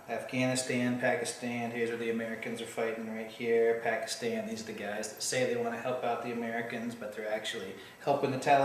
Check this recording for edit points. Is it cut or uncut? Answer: cut